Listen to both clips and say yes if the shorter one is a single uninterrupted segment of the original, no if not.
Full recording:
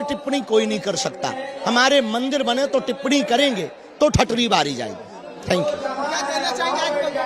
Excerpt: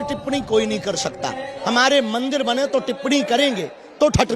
yes